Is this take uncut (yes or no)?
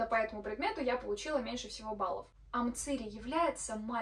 no